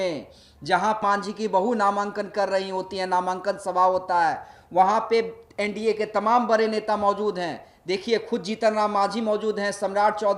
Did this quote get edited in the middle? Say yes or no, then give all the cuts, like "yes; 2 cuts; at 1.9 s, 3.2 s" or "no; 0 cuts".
yes; 1 cut; at 1.0 s